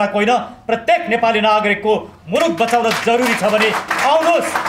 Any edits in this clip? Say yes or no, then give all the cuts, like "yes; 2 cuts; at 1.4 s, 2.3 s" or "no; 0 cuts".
no; 0 cuts